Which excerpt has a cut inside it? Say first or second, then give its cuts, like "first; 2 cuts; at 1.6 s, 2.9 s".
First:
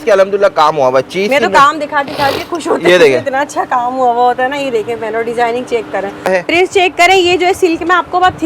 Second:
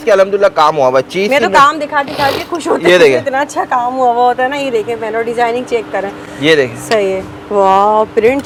first; 1 cut; at 6.3 s